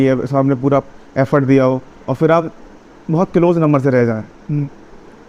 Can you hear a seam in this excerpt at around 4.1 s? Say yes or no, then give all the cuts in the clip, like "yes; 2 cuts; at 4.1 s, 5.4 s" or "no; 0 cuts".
no; 0 cuts